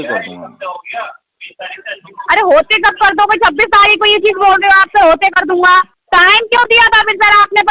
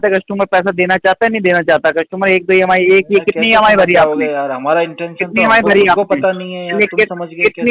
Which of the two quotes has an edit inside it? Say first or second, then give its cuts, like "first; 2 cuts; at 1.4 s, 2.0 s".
first; 1 cut; at 6.0 s